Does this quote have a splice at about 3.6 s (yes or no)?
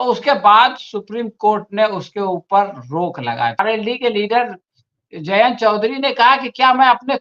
yes